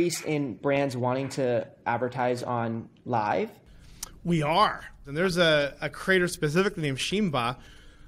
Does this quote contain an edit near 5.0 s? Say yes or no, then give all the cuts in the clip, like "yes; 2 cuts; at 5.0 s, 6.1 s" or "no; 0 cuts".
yes; 1 cut; at 5.0 s